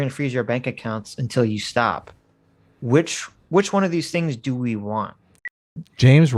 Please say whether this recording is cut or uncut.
cut